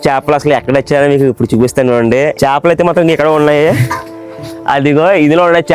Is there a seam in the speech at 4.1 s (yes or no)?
no